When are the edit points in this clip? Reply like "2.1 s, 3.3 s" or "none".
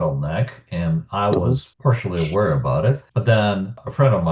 1.7 s, 3.1 s